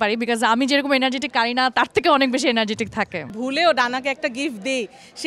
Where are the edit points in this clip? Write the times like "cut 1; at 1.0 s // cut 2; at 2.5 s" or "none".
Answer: cut 1; at 3.3 s